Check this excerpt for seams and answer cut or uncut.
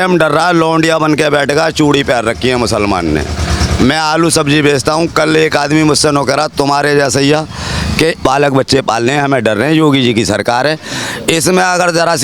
cut